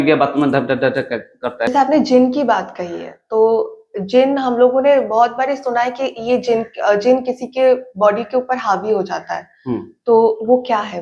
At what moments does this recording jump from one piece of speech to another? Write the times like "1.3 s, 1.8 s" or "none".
1.7 s